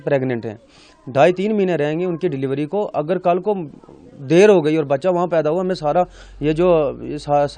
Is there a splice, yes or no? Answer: no